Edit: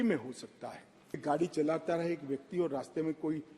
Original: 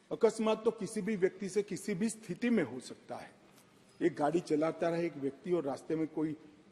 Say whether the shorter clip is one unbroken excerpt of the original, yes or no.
no